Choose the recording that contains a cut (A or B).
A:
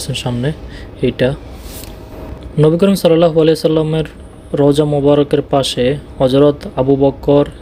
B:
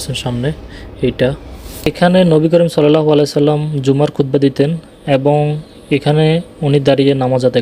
B